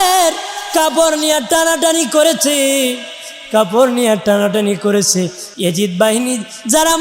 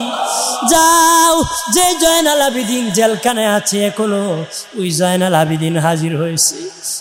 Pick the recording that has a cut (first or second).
first